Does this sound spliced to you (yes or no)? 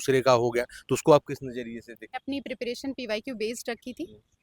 yes